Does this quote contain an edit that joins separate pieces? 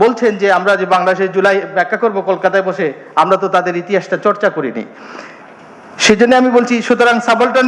no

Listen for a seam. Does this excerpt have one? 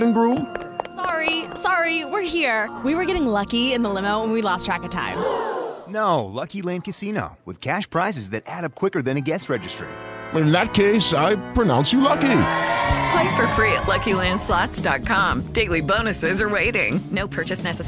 no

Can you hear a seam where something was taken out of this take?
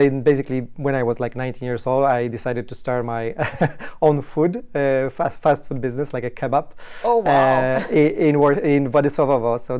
no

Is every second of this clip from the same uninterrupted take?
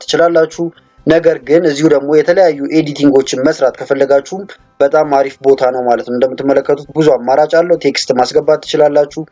yes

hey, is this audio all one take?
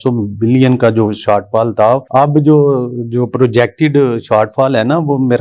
yes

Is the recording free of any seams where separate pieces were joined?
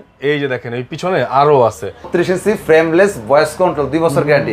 no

